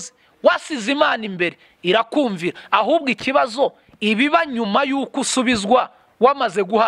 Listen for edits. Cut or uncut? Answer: uncut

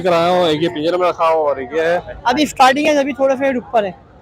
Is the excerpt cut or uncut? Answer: cut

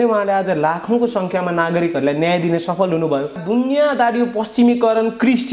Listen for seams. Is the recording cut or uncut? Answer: cut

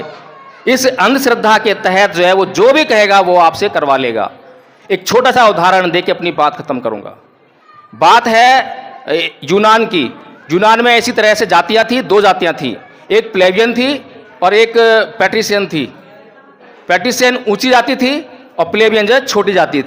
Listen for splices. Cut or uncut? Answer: uncut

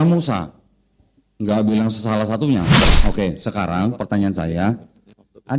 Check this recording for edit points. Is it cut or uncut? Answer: cut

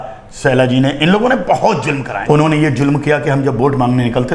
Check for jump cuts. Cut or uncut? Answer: cut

